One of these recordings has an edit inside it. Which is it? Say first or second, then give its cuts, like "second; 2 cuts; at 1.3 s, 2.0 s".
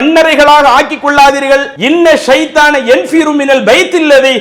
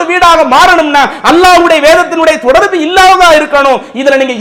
first; 1 cut; at 1.7 s